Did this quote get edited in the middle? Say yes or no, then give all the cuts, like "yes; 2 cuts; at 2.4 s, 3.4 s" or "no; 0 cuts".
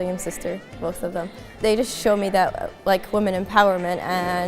yes; 1 cut; at 1.6 s